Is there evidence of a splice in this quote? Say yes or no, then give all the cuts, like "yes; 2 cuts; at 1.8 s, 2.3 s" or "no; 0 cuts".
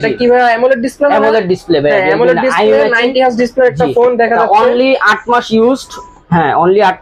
no; 0 cuts